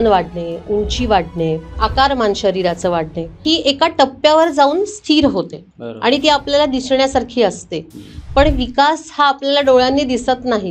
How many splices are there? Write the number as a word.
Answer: two